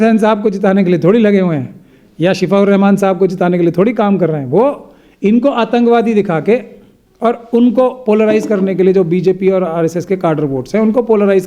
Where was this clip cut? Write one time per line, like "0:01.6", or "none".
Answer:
none